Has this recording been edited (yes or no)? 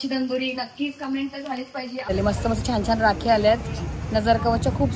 yes